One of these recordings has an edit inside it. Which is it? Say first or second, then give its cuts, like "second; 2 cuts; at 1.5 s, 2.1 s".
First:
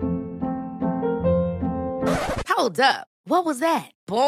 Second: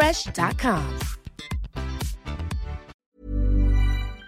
second; 1 cut; at 2.9 s